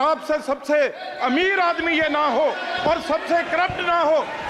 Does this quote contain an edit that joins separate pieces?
no; 0 cuts

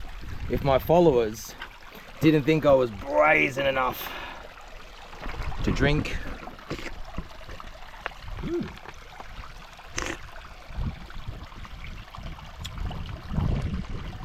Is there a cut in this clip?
no; 0 cuts

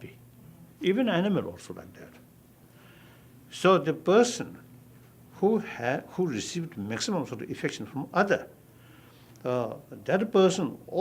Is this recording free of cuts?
yes; 0 cuts

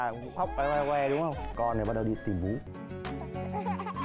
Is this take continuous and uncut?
no; 2 cuts; at 1.4 s, 2.6 s

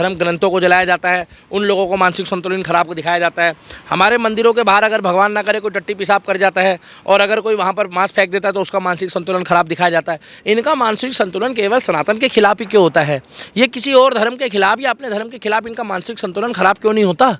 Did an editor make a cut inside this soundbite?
no; 0 cuts

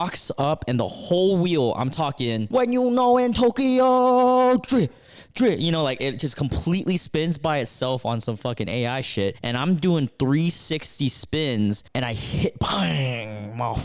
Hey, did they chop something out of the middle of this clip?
yes; 3 cuts; at 2.4 s, 9.4 s, 12.2 s

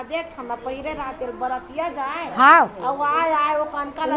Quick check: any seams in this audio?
no; 0 cuts

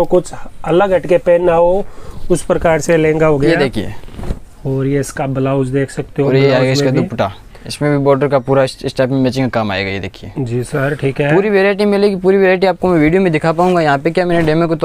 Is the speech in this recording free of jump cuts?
yes; 0 cuts

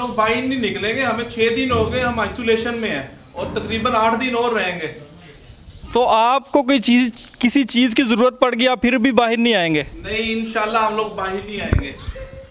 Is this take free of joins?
yes; 0 cuts

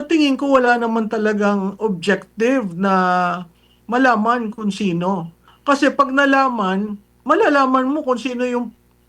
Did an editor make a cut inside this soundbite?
yes; 1 cut; at 5.5 s

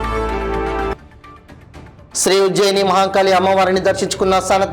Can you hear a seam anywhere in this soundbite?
no; 0 cuts

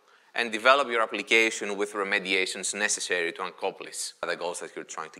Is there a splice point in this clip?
yes; 1 cut; at 4.2 s

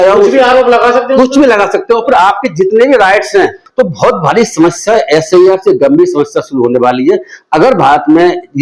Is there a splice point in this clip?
yes; 1 cut; at 3.6 s

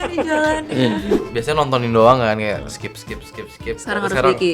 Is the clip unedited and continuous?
no; 1 cut; at 1.2 s

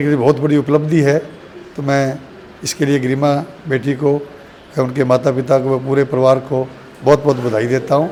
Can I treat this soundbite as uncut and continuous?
yes; 0 cuts

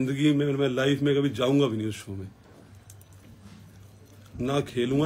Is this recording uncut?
yes; 0 cuts

